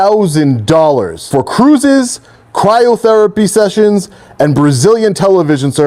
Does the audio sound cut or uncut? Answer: cut